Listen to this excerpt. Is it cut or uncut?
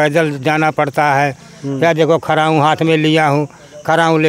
uncut